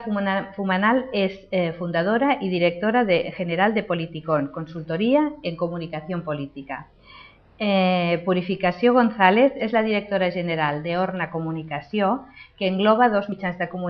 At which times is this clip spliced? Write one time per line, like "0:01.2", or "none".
0:12.5